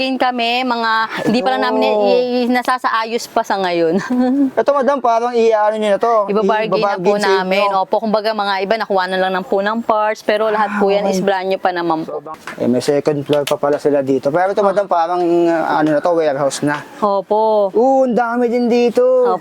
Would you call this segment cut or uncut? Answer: cut